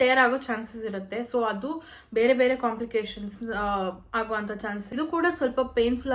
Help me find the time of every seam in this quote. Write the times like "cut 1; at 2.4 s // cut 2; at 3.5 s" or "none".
cut 1; at 4.9 s